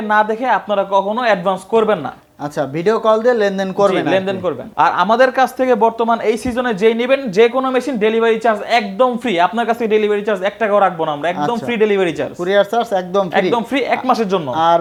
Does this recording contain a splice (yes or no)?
no